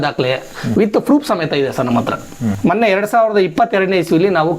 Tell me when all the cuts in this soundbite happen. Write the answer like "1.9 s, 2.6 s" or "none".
2.6 s

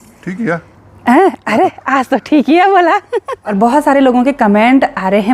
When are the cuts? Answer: 3.4 s

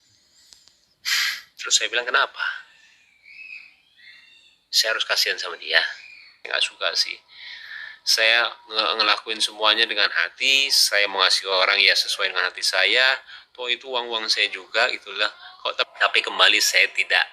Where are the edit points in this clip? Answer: 6.4 s, 15.9 s

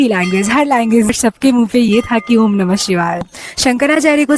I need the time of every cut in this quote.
1.1 s, 3.3 s

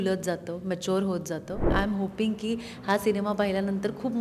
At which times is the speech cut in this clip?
1.7 s

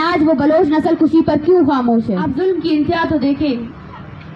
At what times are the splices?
2.3 s

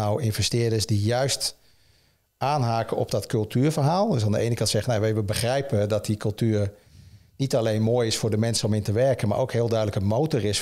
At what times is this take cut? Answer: none

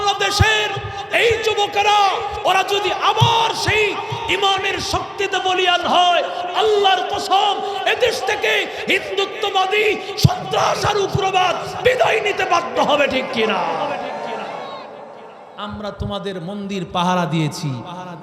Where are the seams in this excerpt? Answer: 10.1 s

